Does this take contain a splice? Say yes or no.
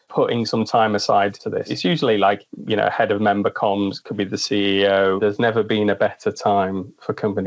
yes